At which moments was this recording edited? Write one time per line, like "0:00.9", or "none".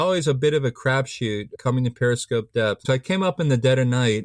0:01.6
0:02.8